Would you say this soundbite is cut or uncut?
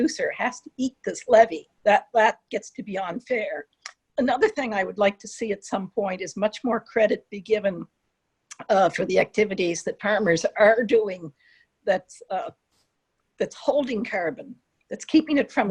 cut